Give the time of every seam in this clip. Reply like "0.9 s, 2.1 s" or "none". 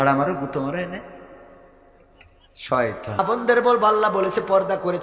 3.2 s